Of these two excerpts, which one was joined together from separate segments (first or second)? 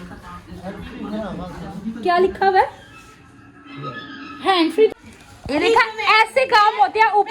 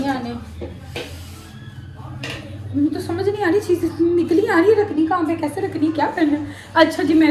first